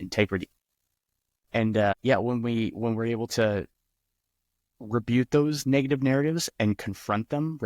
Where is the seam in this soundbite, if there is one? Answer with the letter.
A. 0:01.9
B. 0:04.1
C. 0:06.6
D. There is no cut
A